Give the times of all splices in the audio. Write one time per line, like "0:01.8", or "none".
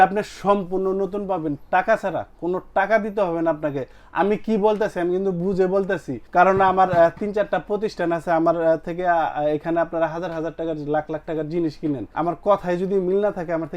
0:06.1
0:12.1

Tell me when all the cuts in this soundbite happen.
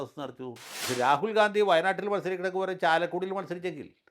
0:01.0

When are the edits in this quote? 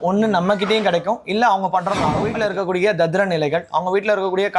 0:02.2

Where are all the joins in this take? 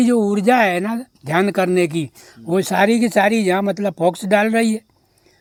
none

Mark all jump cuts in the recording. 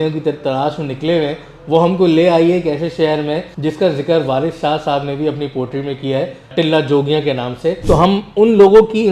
0:03.5
0:06.5
0:07.8

